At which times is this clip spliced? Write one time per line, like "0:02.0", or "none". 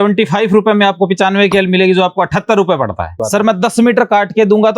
0:03.2